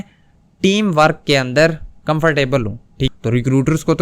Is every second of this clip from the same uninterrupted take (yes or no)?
no